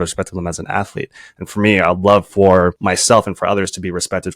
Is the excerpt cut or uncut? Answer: cut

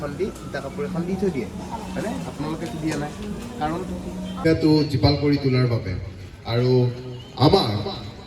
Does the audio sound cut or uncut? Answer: cut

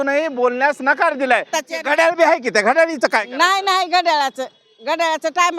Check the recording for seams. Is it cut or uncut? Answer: cut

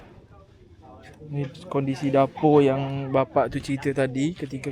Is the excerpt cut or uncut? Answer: uncut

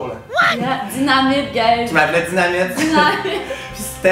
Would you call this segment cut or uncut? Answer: uncut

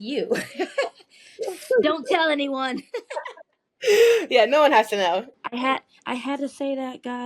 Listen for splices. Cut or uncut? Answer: cut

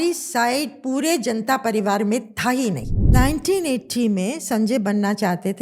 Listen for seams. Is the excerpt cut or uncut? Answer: cut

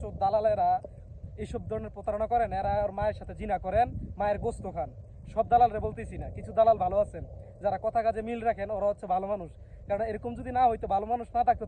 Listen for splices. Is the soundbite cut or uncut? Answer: uncut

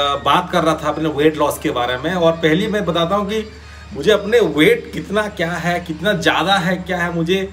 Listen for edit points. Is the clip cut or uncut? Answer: uncut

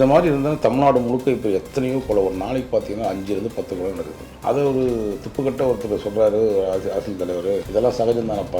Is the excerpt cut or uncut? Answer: cut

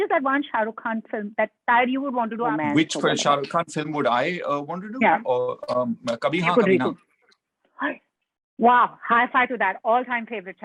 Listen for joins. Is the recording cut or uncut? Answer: cut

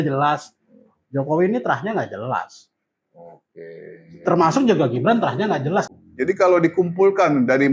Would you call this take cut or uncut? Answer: cut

